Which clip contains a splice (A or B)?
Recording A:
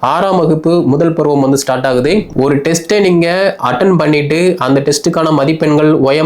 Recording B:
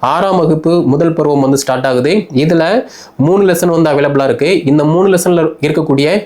A